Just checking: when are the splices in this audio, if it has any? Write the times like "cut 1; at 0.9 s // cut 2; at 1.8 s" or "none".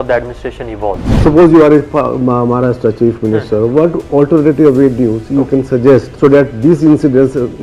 cut 1; at 1.1 s // cut 2; at 6.1 s